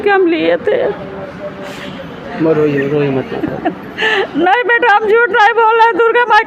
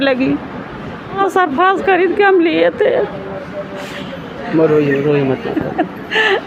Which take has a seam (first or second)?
second